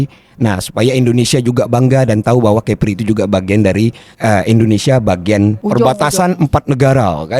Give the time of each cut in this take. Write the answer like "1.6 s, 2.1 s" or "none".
4.1 s, 5.6 s